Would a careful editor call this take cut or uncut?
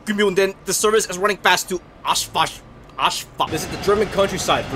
cut